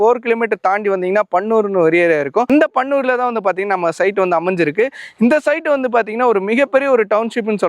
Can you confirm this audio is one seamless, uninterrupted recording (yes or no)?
yes